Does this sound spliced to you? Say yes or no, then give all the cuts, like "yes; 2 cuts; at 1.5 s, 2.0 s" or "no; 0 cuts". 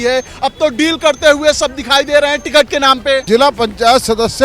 yes; 1 cut; at 3.2 s